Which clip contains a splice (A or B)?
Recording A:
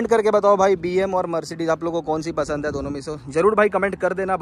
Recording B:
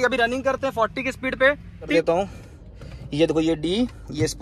B